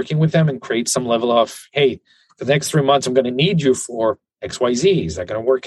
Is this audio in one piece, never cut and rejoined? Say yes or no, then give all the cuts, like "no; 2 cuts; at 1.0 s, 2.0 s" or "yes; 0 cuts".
yes; 0 cuts